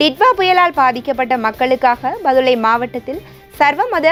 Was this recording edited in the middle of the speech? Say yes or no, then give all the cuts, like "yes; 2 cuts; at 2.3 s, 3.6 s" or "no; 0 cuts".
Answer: no; 0 cuts